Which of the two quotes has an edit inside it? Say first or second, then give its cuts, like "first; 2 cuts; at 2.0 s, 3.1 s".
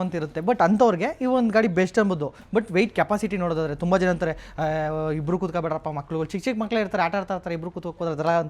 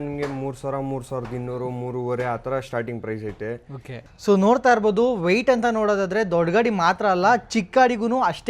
second; 1 cut; at 4.1 s